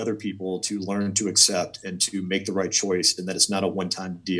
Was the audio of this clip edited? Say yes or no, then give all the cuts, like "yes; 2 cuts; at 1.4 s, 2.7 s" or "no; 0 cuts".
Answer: no; 0 cuts